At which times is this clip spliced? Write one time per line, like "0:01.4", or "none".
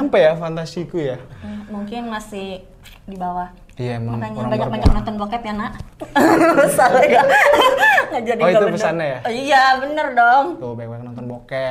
none